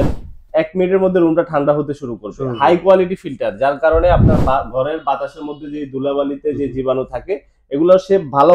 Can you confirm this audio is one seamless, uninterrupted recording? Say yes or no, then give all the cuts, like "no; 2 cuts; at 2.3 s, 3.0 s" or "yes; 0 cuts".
yes; 0 cuts